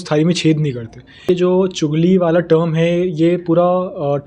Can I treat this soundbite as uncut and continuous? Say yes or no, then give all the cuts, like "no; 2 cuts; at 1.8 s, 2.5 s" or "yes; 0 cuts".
no; 1 cut; at 1.3 s